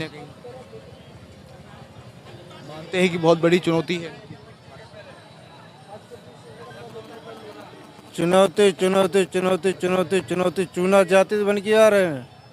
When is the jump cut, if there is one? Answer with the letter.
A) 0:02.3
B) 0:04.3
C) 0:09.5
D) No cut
A